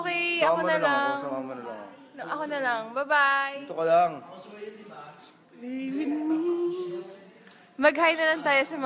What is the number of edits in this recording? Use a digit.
1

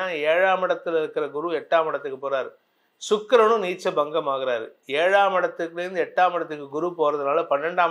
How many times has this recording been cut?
0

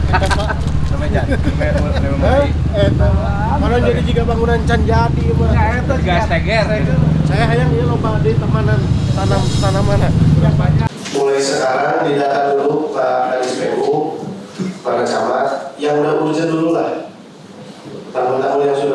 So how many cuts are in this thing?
2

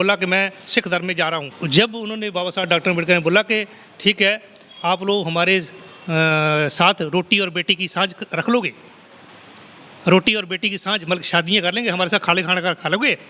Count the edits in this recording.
1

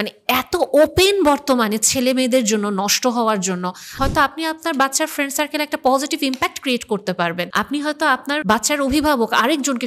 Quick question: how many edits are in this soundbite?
3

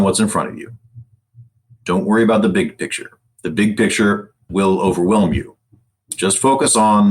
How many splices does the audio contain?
1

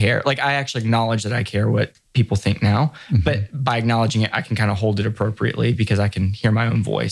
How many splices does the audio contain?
1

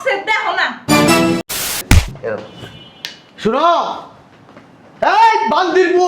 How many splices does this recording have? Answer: 1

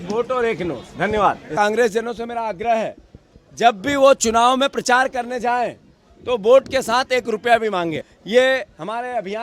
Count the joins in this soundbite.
2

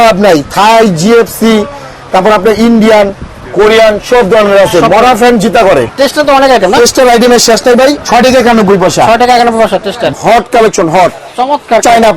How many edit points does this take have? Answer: 3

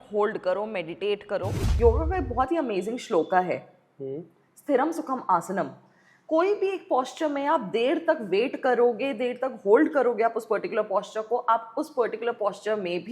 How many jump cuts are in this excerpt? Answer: 1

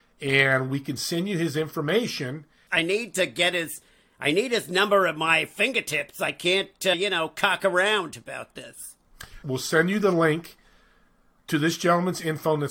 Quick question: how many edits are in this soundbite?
3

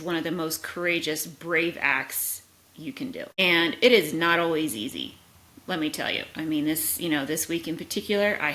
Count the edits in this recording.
0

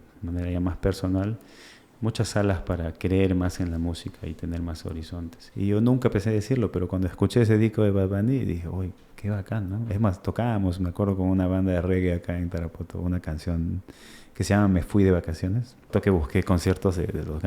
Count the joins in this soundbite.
2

